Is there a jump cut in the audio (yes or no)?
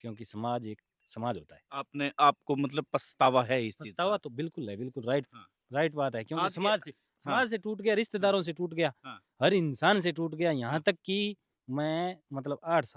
no